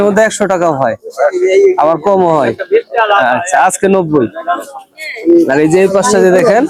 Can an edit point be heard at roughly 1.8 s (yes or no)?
no